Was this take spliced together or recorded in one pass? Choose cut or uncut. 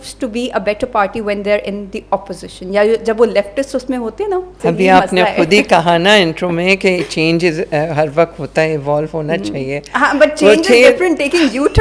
cut